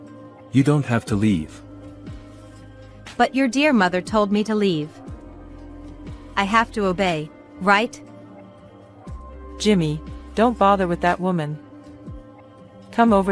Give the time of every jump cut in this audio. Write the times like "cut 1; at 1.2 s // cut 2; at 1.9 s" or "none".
none